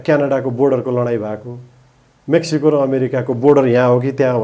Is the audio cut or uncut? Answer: uncut